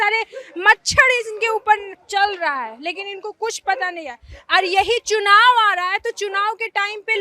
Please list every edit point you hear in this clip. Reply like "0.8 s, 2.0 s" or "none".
none